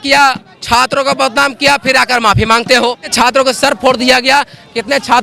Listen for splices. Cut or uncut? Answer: cut